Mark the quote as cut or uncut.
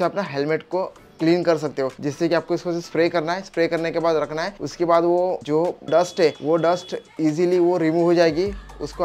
uncut